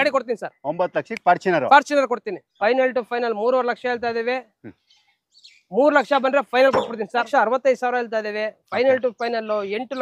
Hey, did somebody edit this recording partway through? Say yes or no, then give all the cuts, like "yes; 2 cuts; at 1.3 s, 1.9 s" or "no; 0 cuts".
yes; 2 cuts; at 2.4 s, 7.3 s